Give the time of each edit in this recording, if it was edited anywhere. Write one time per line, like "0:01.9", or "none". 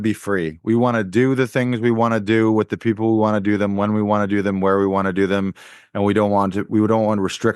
none